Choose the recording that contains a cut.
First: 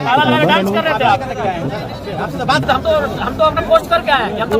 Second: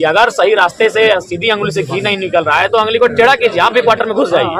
first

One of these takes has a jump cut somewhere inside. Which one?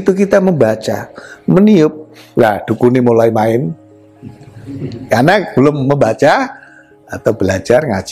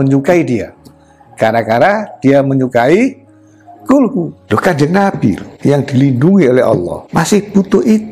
second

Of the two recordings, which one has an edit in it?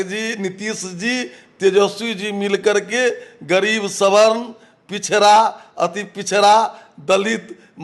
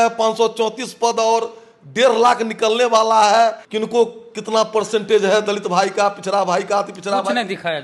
second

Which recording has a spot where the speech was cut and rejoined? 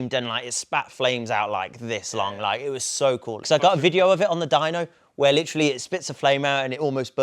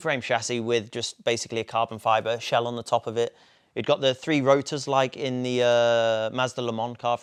first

